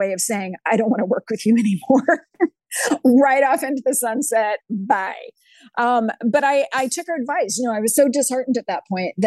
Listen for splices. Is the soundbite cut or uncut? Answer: uncut